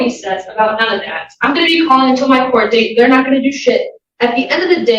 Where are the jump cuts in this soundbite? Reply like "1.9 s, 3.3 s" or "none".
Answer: none